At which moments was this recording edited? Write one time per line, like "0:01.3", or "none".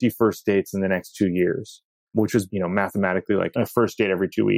0:02.2
0:03.5